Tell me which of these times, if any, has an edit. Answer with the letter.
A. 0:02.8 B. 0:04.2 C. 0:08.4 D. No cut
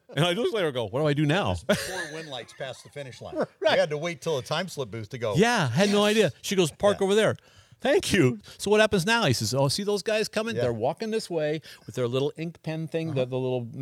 C